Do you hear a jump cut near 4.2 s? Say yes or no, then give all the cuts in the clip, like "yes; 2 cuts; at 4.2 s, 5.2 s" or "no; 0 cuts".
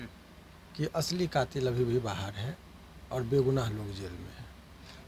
no; 0 cuts